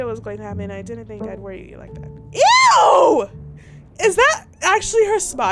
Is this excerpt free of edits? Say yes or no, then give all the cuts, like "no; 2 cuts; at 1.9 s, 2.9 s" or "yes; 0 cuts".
yes; 0 cuts